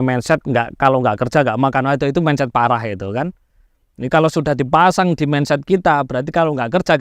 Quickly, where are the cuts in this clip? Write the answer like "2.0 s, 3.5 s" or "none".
none